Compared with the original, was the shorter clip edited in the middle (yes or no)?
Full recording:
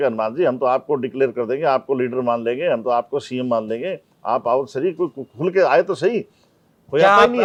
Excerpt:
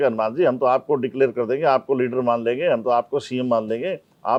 no